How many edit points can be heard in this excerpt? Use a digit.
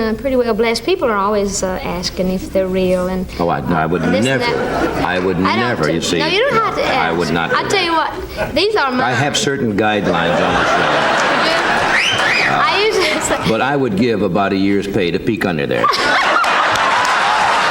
0